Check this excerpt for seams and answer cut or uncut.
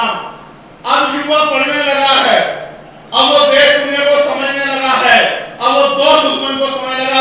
uncut